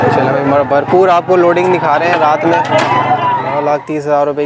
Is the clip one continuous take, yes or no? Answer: no